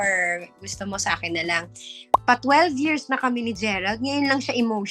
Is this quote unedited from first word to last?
no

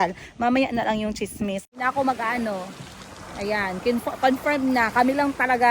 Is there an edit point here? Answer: yes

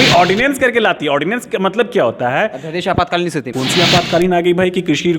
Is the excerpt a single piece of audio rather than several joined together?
no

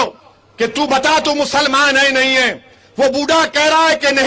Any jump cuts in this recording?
no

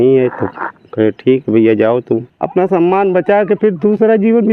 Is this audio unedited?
no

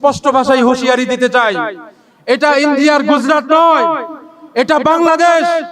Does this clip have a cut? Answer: no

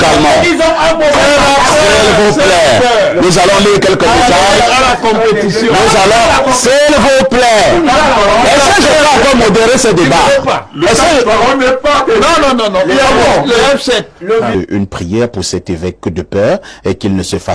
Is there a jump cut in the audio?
yes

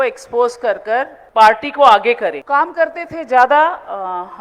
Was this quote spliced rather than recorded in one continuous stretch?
yes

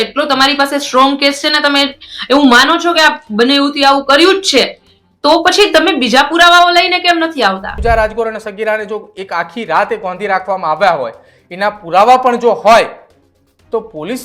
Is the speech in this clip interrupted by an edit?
yes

